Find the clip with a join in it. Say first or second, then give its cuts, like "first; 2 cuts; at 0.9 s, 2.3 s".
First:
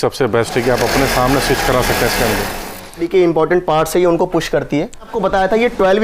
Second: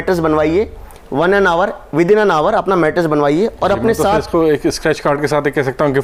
first; 2 cuts; at 3.1 s, 5.1 s